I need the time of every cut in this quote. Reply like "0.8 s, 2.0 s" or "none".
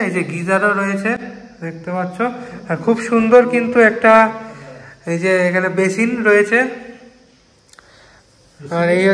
none